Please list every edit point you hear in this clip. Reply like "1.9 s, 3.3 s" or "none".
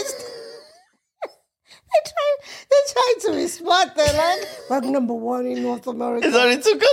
none